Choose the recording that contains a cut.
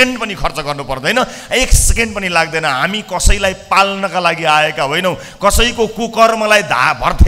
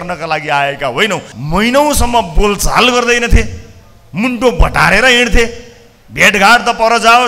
second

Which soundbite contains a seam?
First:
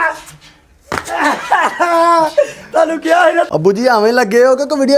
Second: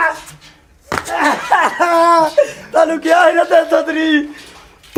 first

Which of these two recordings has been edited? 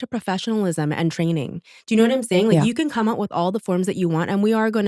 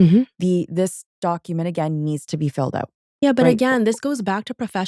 second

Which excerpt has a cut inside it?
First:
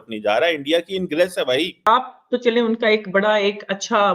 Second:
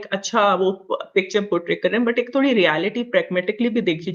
first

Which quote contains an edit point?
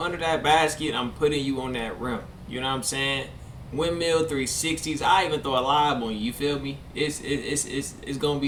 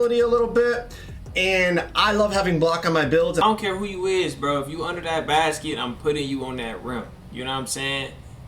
second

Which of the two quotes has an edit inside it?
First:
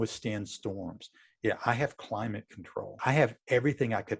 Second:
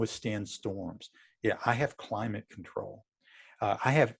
first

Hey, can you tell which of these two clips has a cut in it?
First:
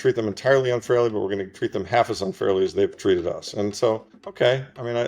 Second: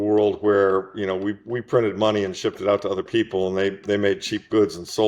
first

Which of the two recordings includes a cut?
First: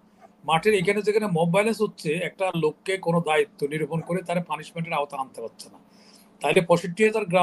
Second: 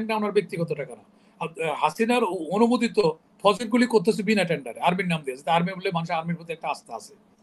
second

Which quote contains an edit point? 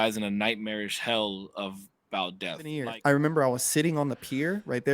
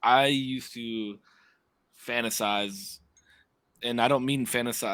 first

